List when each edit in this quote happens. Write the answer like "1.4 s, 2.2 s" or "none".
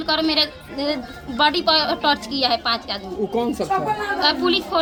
none